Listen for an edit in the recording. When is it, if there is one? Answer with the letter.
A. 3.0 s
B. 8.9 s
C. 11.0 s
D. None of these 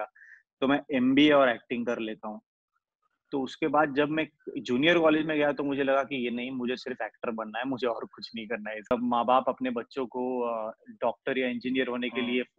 B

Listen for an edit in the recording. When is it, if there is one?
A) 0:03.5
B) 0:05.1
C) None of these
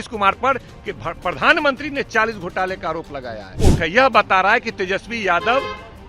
A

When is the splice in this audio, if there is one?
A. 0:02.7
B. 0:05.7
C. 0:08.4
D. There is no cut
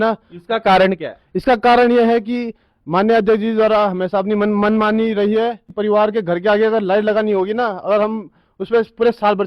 B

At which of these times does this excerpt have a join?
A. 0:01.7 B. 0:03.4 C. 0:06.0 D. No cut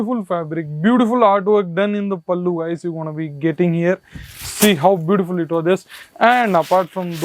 D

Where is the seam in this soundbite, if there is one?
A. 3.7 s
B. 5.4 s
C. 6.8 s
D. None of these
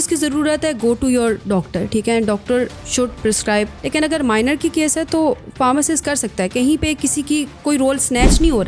A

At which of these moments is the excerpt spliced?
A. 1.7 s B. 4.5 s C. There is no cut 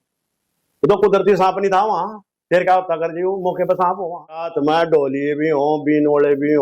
B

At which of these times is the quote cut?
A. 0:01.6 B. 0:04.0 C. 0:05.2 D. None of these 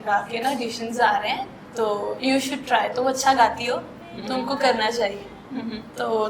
A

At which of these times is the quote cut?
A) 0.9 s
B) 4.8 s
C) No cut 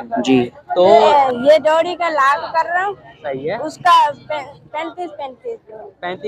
A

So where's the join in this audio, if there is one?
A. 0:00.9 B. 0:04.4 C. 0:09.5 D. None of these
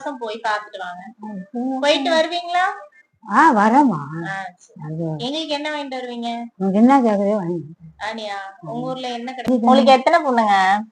C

